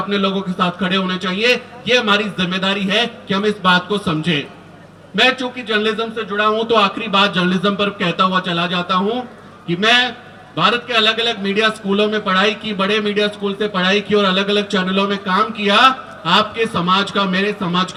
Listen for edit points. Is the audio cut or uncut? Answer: uncut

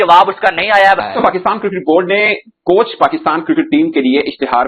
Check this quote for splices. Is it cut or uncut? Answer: uncut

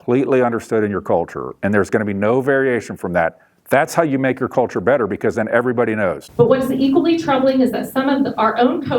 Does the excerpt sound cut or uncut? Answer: cut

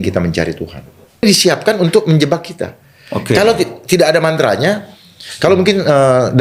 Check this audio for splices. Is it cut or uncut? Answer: cut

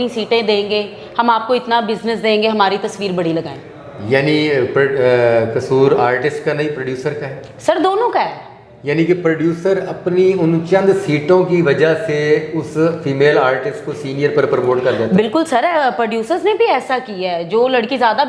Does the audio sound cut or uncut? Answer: uncut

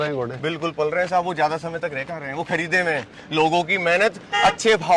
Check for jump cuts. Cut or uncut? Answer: uncut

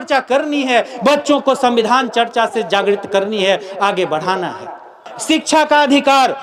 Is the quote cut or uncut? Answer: uncut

